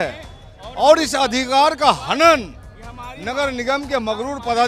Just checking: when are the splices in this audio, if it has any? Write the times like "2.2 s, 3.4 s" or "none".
none